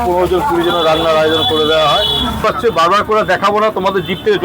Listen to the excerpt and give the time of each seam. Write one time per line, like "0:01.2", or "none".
0:02.4

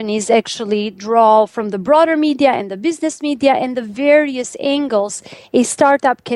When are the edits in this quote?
none

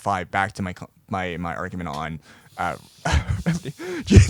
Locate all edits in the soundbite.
none

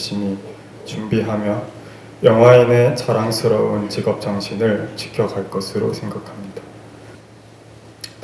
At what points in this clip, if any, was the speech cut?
0:07.1

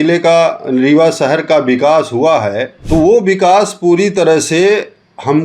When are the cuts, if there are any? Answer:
0:02.7

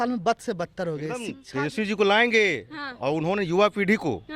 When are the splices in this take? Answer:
0:01.4

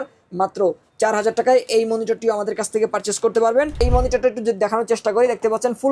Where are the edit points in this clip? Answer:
0:03.8

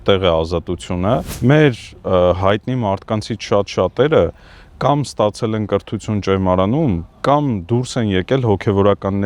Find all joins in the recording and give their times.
0:01.3

